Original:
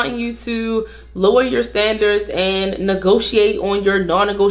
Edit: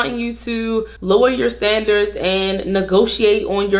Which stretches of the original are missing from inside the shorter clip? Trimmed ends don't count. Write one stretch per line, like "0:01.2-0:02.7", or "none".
0:00.9-0:01.1